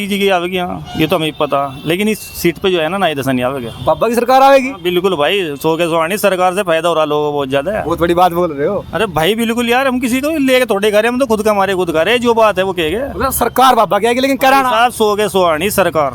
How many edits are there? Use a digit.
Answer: 0